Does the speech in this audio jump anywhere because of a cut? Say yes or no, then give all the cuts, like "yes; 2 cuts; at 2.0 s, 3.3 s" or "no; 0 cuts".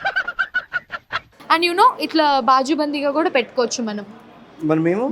yes; 1 cut; at 1.3 s